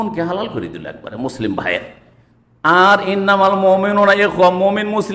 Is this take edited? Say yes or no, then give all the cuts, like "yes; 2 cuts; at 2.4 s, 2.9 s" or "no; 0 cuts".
no; 0 cuts